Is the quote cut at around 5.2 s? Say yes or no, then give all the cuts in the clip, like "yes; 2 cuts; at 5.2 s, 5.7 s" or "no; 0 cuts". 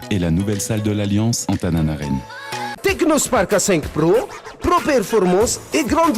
no; 1 cut; at 2.7 s